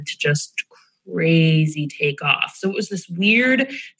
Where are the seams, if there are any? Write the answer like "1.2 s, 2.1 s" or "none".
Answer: none